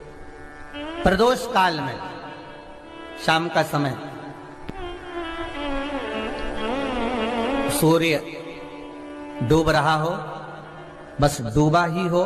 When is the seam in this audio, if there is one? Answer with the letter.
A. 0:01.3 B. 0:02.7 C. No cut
C